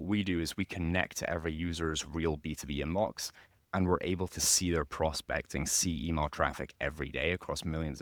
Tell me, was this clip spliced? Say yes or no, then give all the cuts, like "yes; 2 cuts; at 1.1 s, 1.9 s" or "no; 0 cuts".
no; 0 cuts